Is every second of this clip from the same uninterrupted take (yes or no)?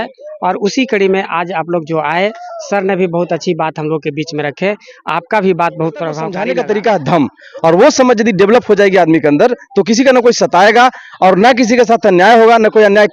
no